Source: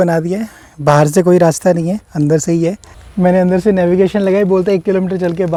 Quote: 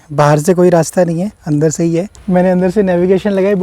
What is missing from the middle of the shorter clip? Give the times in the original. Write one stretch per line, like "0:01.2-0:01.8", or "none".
0:02.8-0:03.0